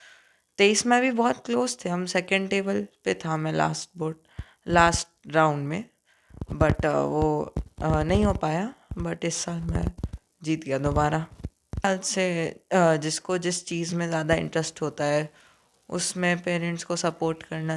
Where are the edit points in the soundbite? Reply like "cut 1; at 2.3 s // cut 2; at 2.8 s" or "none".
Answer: cut 1; at 11.8 s